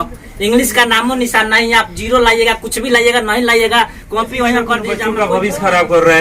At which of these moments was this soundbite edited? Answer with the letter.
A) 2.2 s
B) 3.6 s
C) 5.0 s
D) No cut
C